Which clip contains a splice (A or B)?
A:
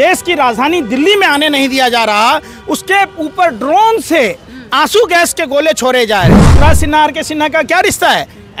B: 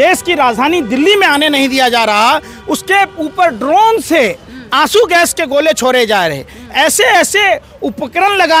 A